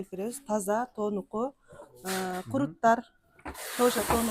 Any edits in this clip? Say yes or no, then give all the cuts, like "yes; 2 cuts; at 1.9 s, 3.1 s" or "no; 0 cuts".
no; 0 cuts